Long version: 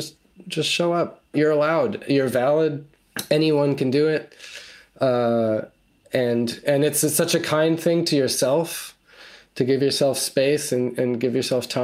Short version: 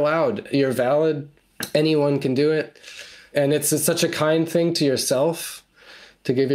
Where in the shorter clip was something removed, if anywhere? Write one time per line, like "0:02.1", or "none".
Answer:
0:03.2

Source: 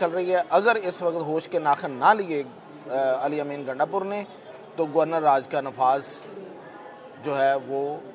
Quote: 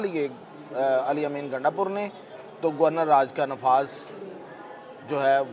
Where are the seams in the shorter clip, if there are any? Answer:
none

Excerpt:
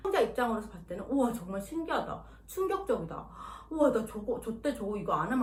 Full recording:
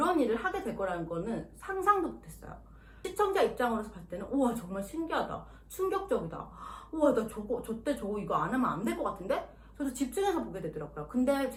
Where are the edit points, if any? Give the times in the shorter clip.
none

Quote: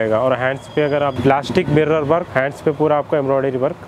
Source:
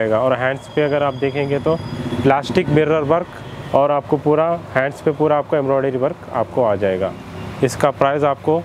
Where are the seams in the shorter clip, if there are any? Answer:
0:01.2
0:02.3

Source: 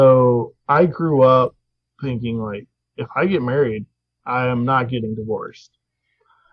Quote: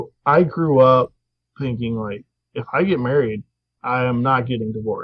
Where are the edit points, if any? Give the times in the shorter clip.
none

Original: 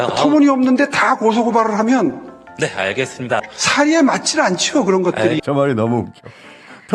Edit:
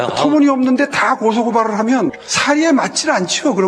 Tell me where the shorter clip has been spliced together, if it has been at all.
0:02.3

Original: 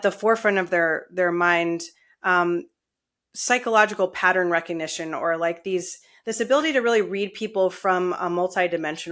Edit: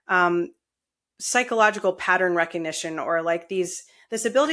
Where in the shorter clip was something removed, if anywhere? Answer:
none

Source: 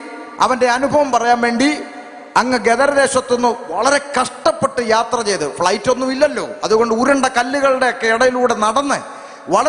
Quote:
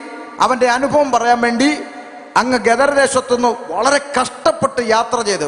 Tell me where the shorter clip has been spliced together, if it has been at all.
none

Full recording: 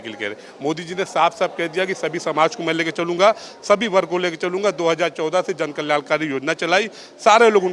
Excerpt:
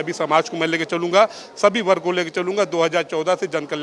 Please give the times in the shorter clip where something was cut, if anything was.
none

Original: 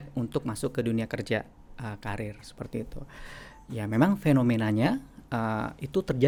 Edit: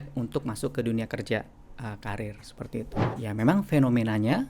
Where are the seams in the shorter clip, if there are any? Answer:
0:03.0

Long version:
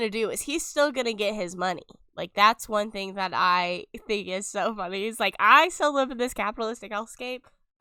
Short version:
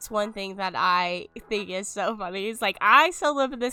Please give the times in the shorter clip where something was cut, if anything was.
none

